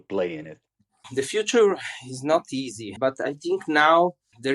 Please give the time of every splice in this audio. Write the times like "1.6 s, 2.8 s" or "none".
2.8 s